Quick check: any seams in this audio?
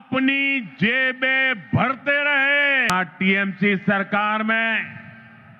yes; 1 cut; at 2.9 s

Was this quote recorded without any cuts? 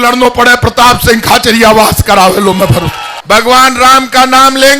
no; 1 cut; at 3.1 s

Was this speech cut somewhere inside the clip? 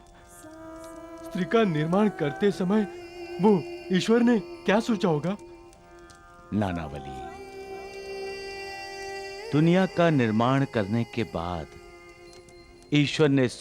no; 0 cuts

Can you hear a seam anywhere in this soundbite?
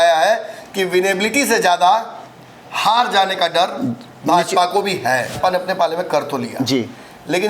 yes; 1 cut; at 5.3 s

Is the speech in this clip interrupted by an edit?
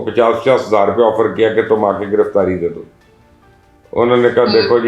no; 0 cuts

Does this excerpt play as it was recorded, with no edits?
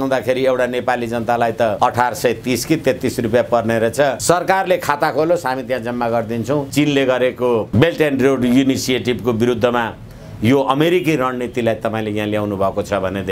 no; 4 cuts; at 1.8 s, 4.2 s, 6.7 s, 7.7 s

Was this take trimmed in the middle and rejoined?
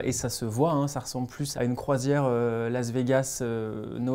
yes; 1 cut; at 1.6 s

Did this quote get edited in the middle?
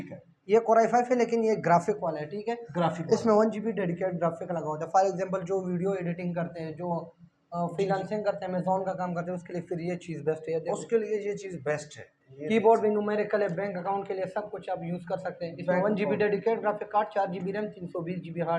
no; 0 cuts

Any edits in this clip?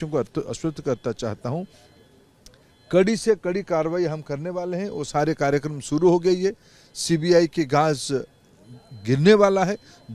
no; 0 cuts

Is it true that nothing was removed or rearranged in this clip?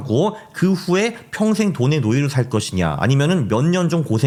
yes; 0 cuts

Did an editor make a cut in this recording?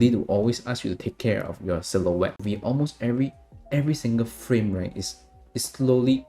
yes; 1 cut; at 2.4 s

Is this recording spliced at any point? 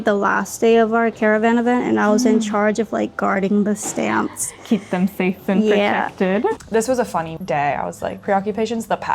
yes; 3 cuts; at 1.1 s, 6.6 s, 7.4 s

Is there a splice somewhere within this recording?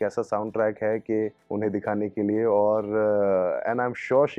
yes; 1 cut; at 1.4 s

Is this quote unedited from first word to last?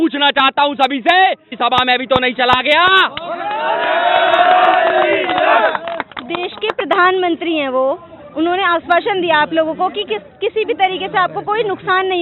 yes; 0 cuts

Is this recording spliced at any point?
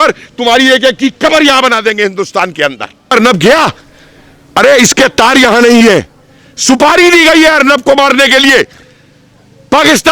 yes; 1 cut; at 3.1 s

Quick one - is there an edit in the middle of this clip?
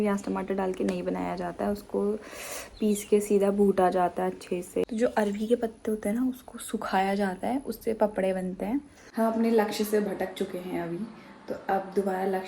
yes; 2 cuts; at 4.9 s, 9.0 s

